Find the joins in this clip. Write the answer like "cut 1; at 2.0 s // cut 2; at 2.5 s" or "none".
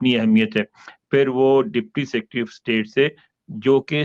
none